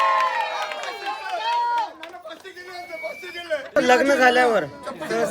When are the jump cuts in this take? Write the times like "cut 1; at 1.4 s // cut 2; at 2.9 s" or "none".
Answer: cut 1; at 3.8 s